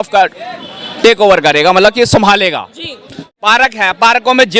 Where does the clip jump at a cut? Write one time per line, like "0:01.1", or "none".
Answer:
0:03.2